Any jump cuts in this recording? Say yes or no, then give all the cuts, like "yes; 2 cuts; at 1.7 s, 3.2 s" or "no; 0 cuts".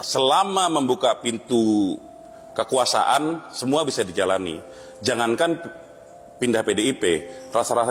no; 0 cuts